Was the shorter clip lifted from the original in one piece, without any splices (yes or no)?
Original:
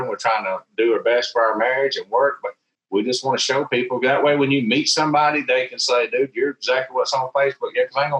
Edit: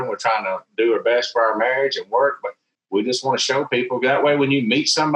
yes